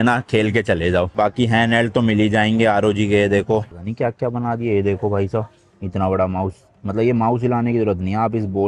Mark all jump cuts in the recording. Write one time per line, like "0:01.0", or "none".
0:01.1
0:03.8